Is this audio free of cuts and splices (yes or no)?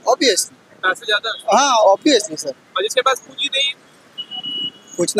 yes